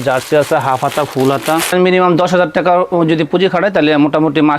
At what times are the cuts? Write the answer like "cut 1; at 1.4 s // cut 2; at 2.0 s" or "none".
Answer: cut 1; at 1.7 s